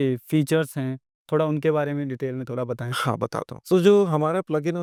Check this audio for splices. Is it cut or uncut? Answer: uncut